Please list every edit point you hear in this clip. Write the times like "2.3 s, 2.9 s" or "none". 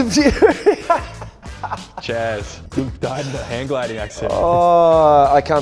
2.6 s